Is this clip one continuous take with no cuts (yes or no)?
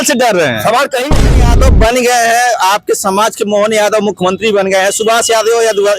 no